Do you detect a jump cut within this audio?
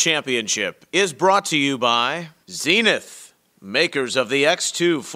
yes; 1 cut; at 2.3 s

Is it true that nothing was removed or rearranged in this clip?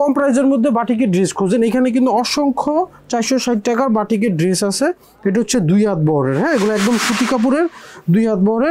yes; 0 cuts

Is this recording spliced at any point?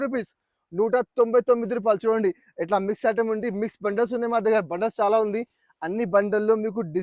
no; 0 cuts

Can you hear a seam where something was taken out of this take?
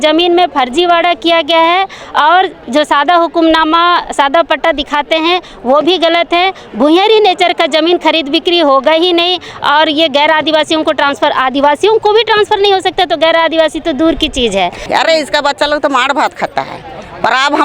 yes; 1 cut; at 14.9 s

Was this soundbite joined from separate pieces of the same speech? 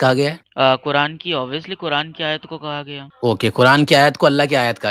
no; 0 cuts

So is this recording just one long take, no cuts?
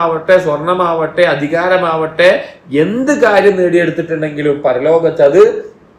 yes; 0 cuts

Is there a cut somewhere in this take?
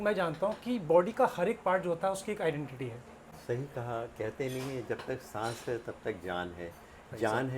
yes; 1 cut; at 3.3 s

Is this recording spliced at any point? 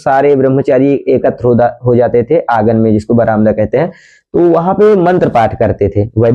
no; 0 cuts

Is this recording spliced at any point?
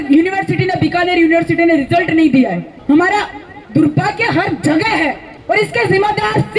yes; 2 cuts; at 2.7 s, 5.3 s

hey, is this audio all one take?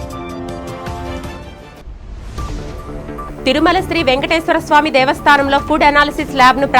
no; 1 cut; at 1.6 s

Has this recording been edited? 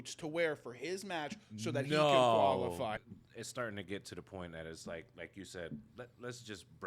yes; 1 cut; at 3.0 s

